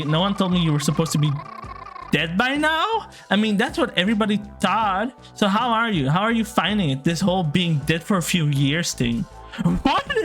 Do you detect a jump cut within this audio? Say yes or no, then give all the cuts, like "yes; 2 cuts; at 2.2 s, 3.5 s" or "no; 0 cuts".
no; 0 cuts